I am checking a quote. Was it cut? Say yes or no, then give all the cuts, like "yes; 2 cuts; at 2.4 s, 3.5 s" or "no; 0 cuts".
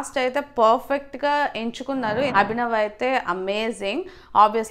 yes; 1 cut; at 2.3 s